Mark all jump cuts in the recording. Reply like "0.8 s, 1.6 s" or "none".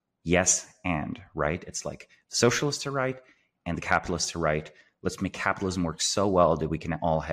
none